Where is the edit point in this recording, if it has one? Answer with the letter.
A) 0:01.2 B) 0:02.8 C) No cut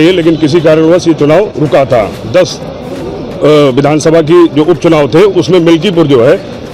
C